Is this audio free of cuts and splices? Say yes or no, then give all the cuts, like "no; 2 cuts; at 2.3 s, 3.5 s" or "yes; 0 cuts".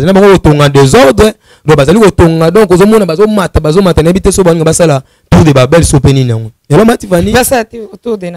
yes; 0 cuts